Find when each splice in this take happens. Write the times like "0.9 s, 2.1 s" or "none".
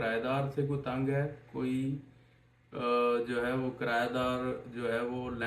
none